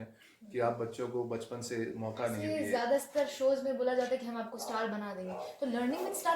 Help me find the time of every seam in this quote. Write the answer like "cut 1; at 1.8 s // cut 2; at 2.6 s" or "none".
cut 1; at 2.4 s

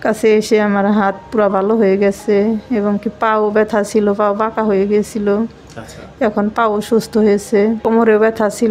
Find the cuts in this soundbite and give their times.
cut 1; at 7.8 s

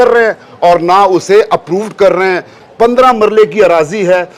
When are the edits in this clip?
cut 1; at 2.6 s

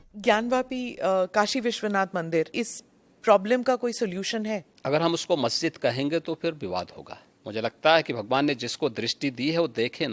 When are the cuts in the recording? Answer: cut 1; at 1.1 s

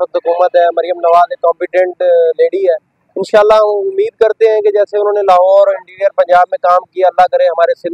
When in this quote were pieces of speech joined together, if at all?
none

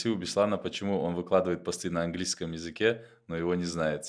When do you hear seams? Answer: none

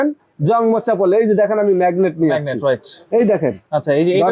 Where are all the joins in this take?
none

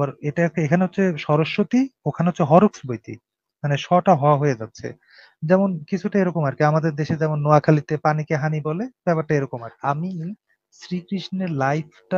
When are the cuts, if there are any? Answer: cut 1; at 9.7 s

